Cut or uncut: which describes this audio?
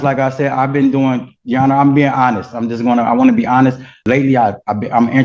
cut